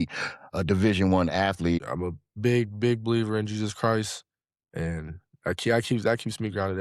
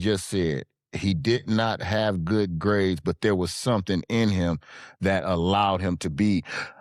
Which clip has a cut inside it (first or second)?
first